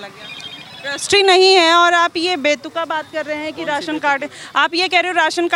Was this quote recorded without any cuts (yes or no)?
yes